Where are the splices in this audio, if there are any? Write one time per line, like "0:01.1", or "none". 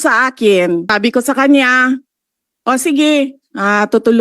0:00.9

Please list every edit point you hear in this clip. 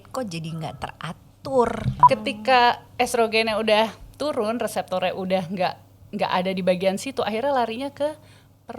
0:02.0

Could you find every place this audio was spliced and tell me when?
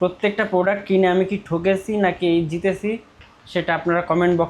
none

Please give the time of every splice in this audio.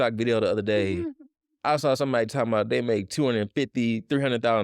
none

